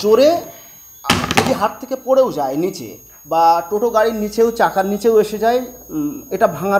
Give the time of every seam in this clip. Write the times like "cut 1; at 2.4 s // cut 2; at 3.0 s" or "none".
none